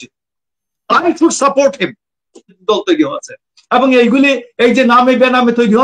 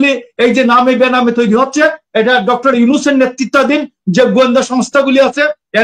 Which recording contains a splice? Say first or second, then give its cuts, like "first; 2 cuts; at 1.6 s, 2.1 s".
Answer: first; 1 cut; at 2.6 s